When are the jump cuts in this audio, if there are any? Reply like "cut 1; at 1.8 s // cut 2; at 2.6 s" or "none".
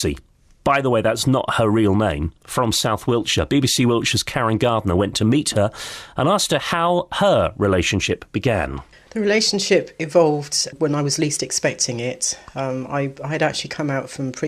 none